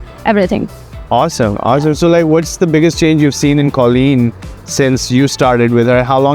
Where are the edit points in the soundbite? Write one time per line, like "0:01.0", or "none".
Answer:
none

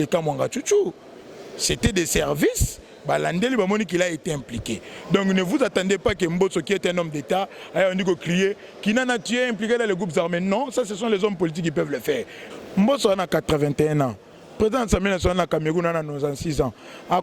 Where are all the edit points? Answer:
0:12.4

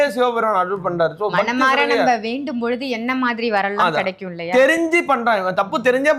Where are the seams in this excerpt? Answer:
none

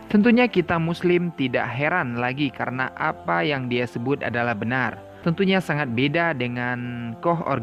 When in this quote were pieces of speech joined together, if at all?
0:05.1

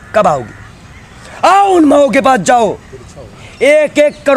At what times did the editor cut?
none

